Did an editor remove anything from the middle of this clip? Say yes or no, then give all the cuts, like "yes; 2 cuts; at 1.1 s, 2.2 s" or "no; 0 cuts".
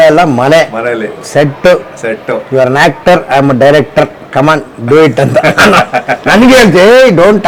no; 0 cuts